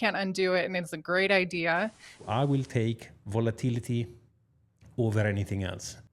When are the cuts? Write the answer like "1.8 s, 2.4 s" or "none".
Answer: 2.1 s

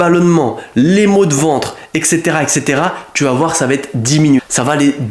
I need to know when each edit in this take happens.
none

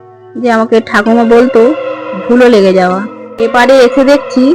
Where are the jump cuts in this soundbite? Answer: 3.2 s

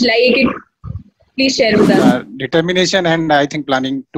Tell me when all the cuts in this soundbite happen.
2.0 s

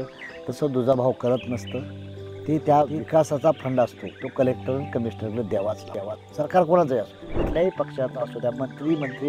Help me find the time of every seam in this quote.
7.4 s

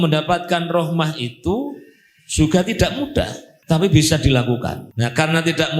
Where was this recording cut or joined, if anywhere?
3.5 s, 4.8 s

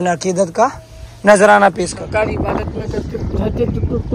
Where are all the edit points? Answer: 1.9 s

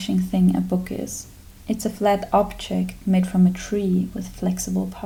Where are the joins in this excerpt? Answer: none

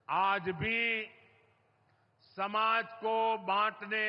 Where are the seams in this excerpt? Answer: none

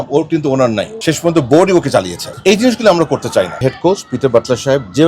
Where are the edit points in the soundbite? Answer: 3.6 s

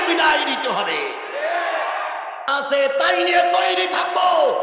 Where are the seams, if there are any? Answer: 2.4 s

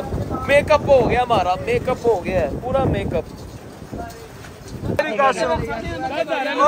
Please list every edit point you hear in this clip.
5.0 s

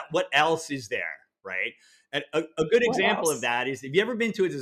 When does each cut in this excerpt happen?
none

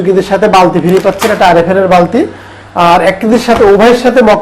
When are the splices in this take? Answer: none

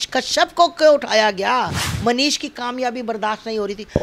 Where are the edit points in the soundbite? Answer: 1.8 s

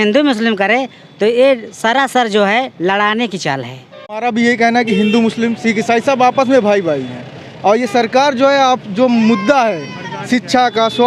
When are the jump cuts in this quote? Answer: 4.2 s

